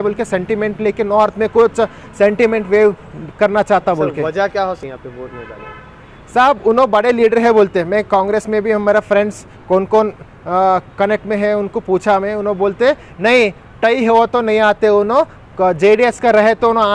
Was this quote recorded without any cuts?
yes; 0 cuts

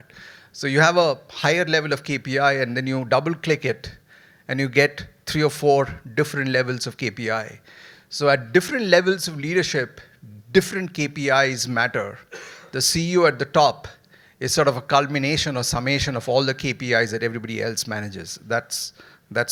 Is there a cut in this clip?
no; 0 cuts

